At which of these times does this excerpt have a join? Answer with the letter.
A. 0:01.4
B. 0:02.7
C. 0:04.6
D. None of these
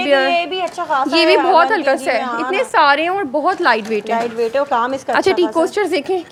D